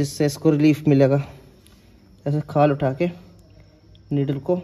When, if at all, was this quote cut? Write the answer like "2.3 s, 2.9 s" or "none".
none